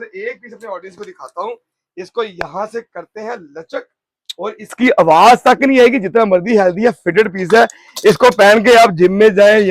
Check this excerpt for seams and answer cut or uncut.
uncut